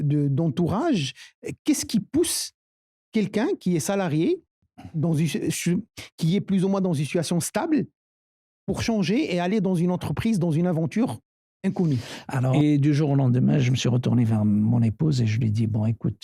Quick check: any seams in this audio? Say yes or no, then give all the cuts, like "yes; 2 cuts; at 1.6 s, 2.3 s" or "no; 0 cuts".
yes; 1 cut; at 12.5 s